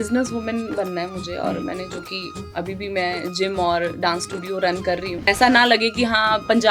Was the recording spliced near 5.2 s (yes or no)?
yes